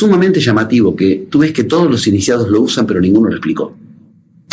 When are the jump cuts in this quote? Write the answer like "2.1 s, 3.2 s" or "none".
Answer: none